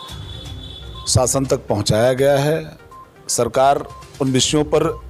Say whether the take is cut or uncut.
uncut